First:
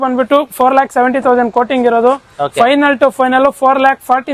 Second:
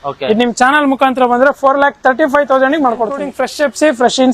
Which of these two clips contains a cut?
second; 1 cut; at 3.4 s

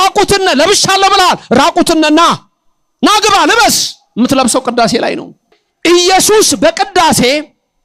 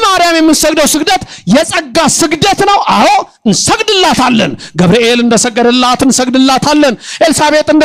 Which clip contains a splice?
first; 1 cut; at 5.7 s

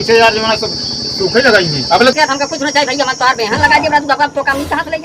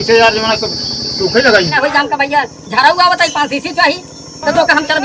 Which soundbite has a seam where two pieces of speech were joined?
second; 1 cut; at 1.7 s

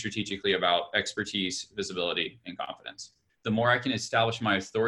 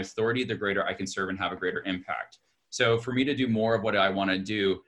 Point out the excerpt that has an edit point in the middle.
first; 1 cut; at 3.3 s

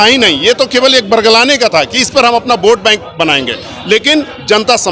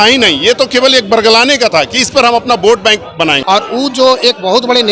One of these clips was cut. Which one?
second; 1 cut; at 3.4 s

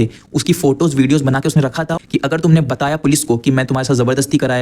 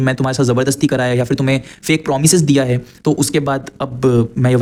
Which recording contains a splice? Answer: first; 1 cut; at 2.0 s

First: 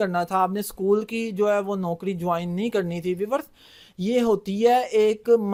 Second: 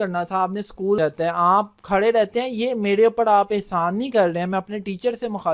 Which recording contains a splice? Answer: second; 1 cut; at 1.0 s

